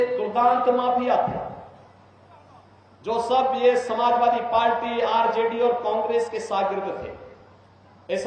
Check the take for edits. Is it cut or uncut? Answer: uncut